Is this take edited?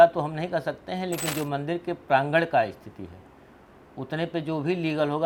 no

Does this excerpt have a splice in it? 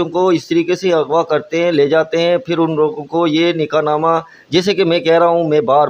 no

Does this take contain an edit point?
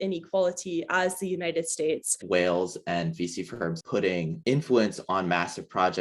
yes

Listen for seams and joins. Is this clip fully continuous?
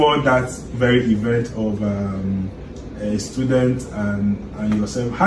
yes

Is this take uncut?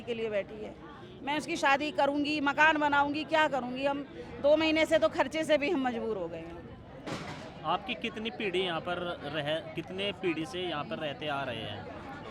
yes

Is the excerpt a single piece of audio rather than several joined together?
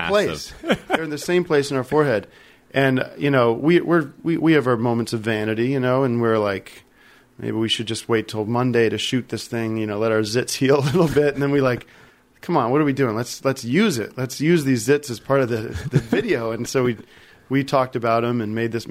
yes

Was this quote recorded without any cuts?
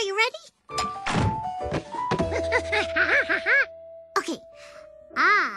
no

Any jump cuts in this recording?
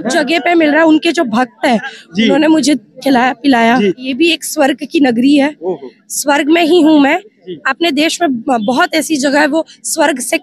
yes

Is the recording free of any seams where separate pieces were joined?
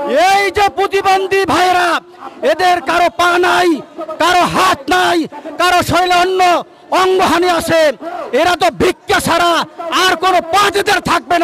yes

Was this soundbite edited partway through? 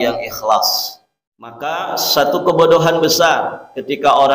yes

